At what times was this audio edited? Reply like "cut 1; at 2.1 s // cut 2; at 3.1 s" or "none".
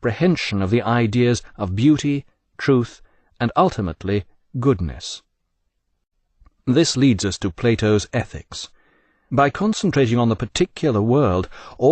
none